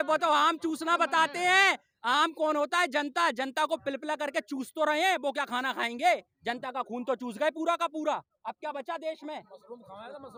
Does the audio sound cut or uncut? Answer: uncut